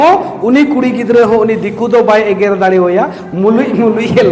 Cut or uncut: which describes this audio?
uncut